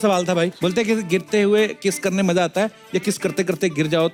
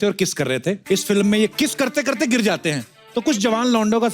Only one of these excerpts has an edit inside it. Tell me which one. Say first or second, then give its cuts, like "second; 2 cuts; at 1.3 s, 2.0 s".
second; 2 cuts; at 0.8 s, 1.5 s